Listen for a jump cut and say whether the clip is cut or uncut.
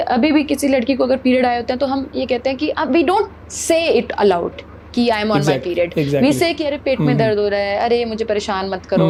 uncut